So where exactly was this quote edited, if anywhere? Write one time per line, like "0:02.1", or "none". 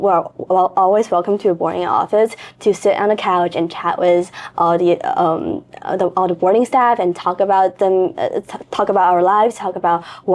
none